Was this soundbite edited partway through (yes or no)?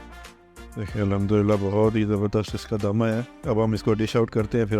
yes